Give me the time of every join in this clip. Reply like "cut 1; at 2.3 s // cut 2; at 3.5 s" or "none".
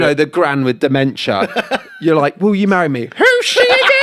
none